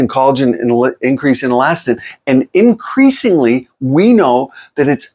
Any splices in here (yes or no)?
no